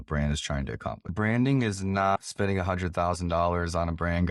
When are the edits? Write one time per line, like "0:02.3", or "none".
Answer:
0:01.1